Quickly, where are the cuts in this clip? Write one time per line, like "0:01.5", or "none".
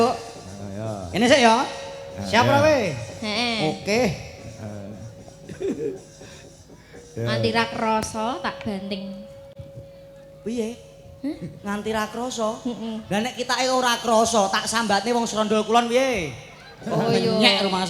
none